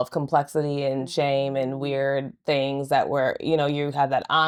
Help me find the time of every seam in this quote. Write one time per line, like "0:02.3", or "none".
none